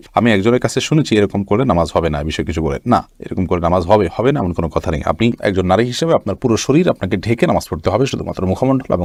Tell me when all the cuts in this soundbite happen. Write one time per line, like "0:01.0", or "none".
none